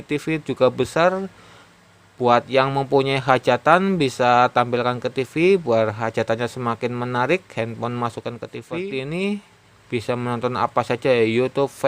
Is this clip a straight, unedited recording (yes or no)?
no